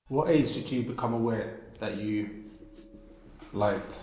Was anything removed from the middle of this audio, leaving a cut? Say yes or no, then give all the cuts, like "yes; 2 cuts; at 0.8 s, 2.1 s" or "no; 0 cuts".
no; 0 cuts